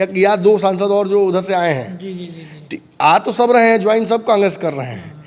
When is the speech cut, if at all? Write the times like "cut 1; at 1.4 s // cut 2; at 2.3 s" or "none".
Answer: none

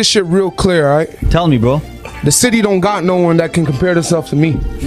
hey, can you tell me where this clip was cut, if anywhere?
cut 1; at 1.9 s

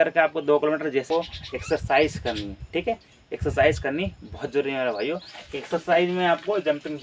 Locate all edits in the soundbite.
cut 1; at 1.1 s

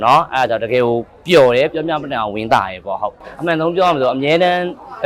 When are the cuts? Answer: none

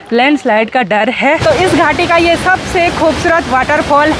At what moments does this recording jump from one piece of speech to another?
cut 1; at 1.4 s

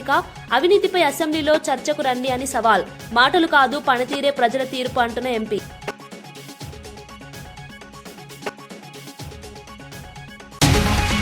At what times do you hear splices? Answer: none

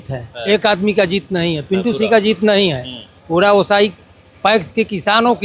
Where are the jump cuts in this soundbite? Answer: none

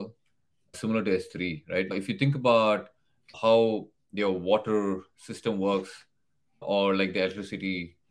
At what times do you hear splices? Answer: cut 1; at 0.8 s // cut 2; at 1.9 s // cut 3; at 3.3 s // cut 4; at 6.6 s

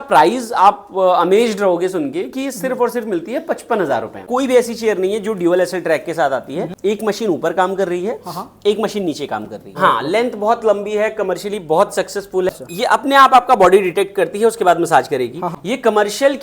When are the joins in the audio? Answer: cut 1; at 4.2 s // cut 2; at 6.7 s // cut 3; at 9.6 s // cut 4; at 12.5 s // cut 5; at 15.5 s

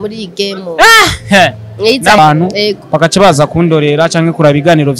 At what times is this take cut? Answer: cut 1; at 2.2 s

